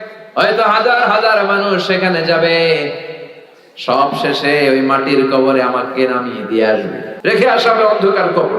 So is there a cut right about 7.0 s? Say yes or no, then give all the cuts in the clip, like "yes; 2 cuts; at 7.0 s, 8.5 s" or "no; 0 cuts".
yes; 1 cut; at 7.0 s